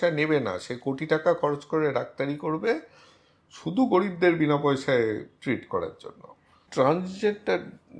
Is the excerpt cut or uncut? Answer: cut